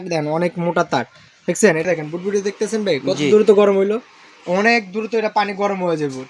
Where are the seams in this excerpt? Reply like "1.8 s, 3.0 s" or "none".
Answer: 1.8 s